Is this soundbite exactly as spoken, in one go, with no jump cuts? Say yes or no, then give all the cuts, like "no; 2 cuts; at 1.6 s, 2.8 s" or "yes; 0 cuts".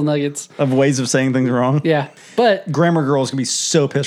no; 1 cut; at 2.2 s